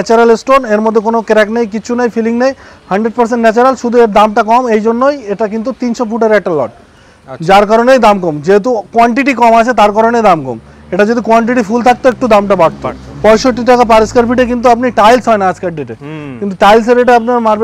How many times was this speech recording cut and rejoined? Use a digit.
0